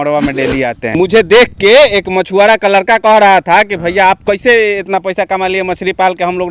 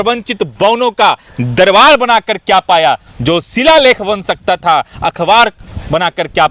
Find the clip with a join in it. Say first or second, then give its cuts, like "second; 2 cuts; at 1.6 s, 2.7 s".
first; 1 cut; at 1.0 s